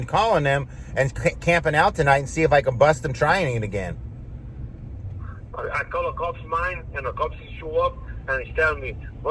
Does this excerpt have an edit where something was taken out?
no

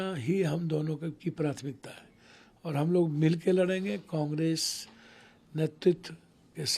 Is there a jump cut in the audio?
no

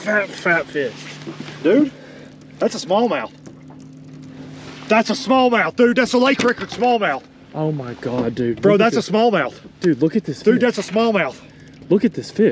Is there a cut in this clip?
no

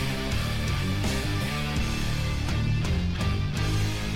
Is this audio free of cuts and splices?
yes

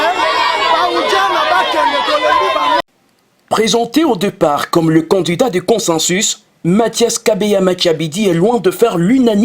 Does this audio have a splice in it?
yes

